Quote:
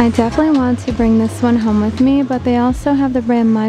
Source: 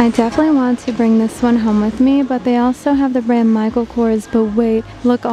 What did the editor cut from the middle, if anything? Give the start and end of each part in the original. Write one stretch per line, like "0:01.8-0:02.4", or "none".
none